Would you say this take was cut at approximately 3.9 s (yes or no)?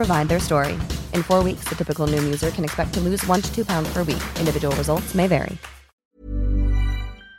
no